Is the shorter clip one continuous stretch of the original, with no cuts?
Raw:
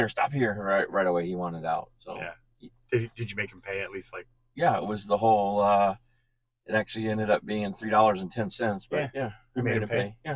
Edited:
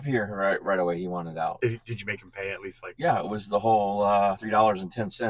no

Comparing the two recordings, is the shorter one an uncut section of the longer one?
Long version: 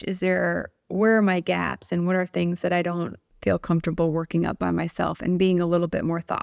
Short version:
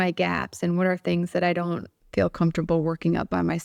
yes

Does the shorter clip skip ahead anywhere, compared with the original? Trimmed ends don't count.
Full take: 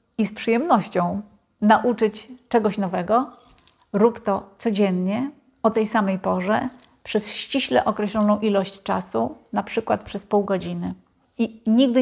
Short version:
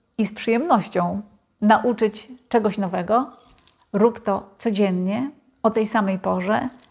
no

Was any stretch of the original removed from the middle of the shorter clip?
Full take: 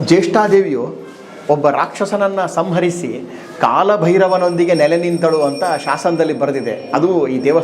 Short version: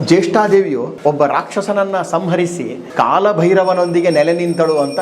yes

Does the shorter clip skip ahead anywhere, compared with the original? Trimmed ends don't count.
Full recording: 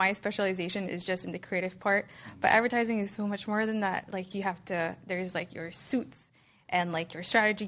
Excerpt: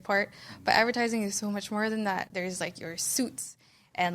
yes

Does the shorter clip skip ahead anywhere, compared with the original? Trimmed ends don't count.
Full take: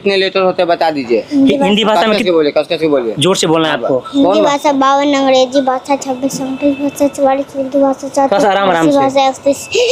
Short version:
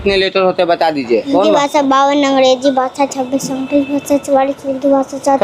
yes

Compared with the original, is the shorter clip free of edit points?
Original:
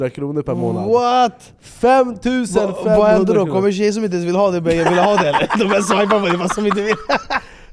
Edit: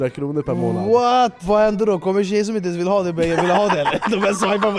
no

